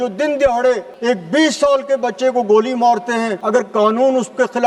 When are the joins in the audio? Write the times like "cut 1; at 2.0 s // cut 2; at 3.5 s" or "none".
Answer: cut 1; at 0.9 s // cut 2; at 3.4 s